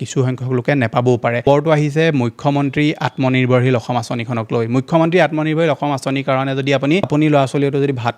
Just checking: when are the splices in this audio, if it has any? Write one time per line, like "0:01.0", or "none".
0:01.4
0:07.0